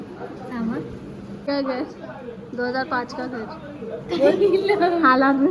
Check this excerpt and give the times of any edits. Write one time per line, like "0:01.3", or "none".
0:01.5